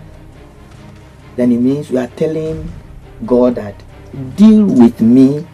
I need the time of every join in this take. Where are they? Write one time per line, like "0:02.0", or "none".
none